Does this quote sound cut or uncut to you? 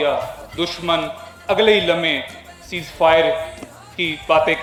uncut